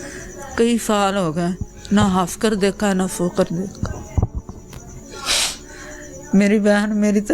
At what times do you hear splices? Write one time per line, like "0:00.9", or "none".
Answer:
0:05.0